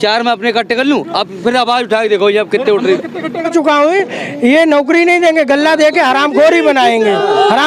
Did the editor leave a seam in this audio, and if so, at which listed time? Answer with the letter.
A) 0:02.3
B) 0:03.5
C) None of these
B